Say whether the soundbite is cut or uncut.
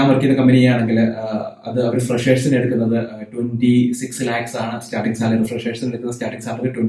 uncut